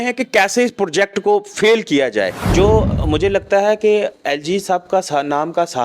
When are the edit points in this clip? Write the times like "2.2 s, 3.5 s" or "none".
2.4 s